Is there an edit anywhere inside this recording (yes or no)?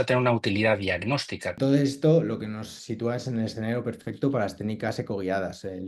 yes